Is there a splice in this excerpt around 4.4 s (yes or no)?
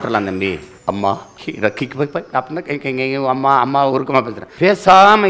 yes